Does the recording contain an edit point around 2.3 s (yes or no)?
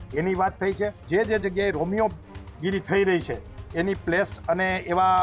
no